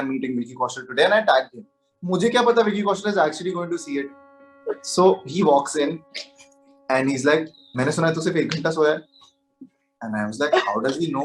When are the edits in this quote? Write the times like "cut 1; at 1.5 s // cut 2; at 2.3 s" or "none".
none